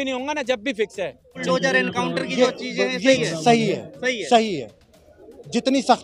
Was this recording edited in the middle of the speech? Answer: yes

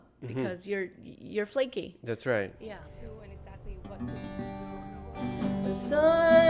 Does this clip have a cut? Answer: yes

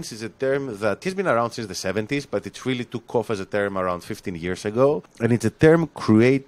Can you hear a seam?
yes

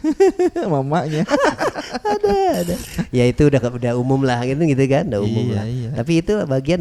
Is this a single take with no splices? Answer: yes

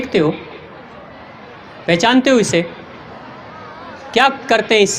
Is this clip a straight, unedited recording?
yes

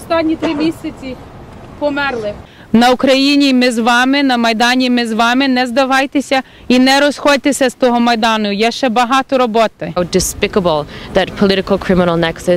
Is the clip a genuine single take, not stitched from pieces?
no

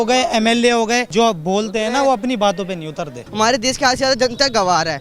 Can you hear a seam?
yes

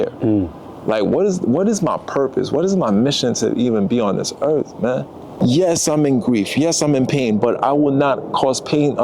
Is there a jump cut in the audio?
yes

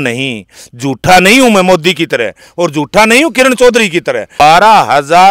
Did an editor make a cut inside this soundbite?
yes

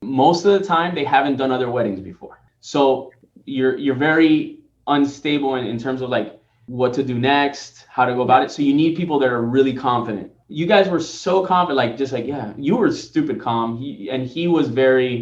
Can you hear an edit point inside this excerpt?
no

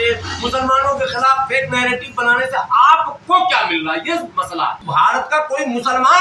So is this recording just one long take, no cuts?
no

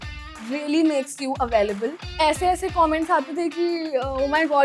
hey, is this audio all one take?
no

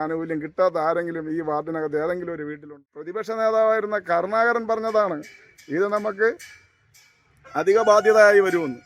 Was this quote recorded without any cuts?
no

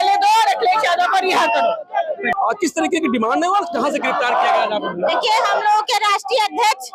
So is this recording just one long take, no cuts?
yes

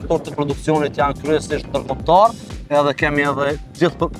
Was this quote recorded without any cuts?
yes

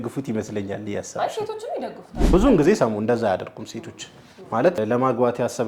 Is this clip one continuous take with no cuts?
no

